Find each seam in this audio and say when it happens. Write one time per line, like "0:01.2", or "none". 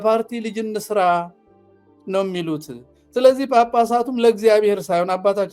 none